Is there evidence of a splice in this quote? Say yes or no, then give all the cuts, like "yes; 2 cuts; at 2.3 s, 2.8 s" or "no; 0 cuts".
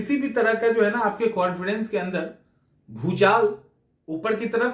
no; 0 cuts